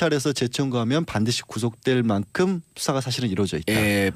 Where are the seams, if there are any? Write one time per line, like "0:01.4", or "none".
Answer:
none